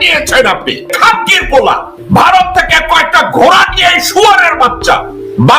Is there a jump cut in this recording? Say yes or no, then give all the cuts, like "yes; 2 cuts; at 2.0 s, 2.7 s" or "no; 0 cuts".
yes; 2 cuts; at 0.9 s, 1.9 s